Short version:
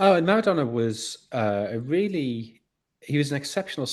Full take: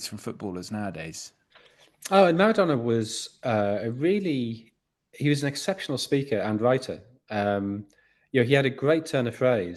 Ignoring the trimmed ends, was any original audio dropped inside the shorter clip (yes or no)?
no